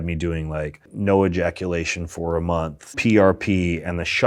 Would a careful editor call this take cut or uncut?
cut